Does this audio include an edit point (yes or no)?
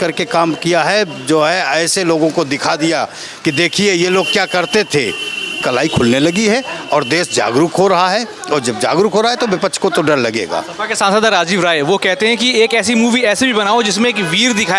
no